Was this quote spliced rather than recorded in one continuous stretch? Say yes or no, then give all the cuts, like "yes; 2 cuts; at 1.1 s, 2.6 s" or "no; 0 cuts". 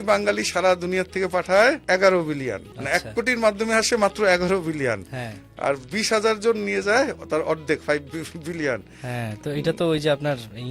yes; 2 cuts; at 1.8 s, 2.7 s